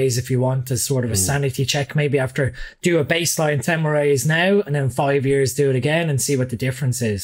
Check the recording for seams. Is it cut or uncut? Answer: uncut